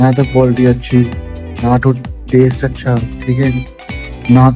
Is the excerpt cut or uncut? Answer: uncut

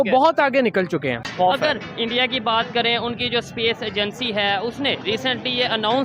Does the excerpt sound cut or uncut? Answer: cut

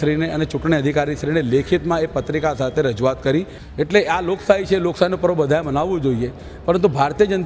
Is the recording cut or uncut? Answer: cut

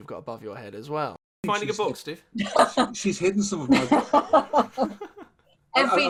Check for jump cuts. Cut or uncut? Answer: cut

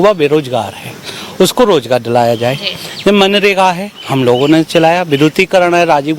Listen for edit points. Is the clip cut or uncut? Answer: uncut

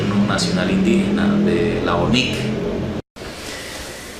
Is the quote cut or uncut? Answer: cut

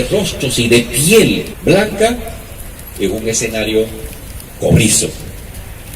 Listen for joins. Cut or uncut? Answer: cut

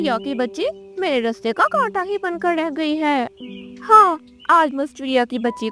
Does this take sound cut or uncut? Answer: cut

